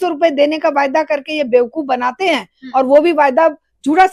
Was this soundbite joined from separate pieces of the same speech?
no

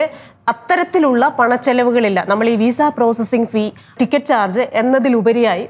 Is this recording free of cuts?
no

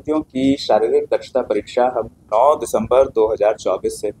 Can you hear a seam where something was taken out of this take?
no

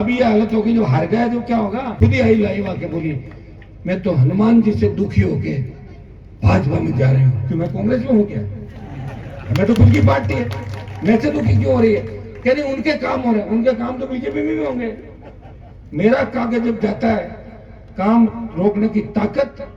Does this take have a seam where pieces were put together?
yes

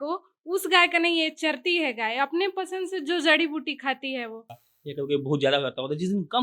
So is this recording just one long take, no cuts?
no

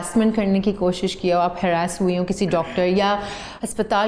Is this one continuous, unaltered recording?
yes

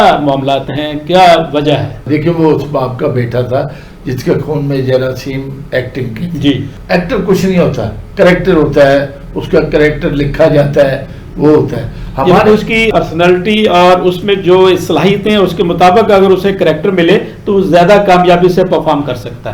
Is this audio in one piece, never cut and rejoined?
yes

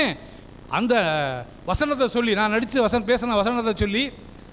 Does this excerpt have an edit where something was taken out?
no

